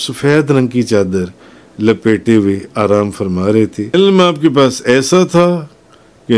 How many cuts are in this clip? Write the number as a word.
one